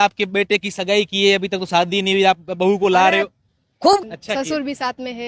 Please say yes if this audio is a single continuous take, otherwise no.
no